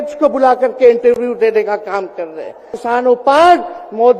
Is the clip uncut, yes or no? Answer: no